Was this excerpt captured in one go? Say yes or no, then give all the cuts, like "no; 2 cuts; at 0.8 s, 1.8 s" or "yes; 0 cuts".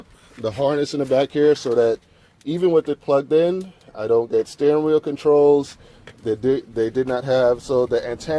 yes; 0 cuts